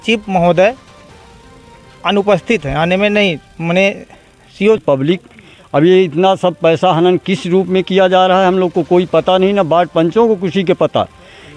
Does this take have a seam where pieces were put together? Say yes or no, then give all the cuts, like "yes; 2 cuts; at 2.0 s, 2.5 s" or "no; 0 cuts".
yes; 1 cut; at 4.8 s